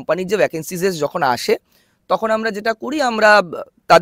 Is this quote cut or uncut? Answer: uncut